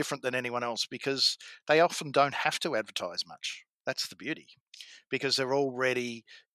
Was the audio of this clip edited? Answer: no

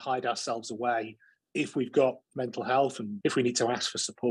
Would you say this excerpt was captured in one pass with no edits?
no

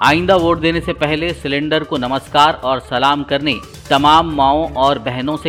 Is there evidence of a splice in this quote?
no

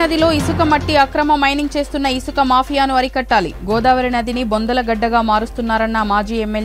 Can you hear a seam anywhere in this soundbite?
no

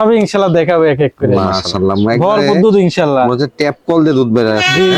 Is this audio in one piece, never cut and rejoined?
no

